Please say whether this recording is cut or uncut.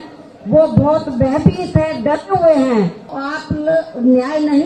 cut